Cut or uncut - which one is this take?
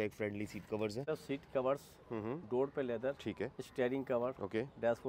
cut